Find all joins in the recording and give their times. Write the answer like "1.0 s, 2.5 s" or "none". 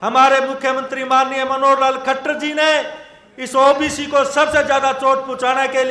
none